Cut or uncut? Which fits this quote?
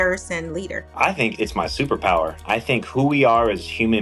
cut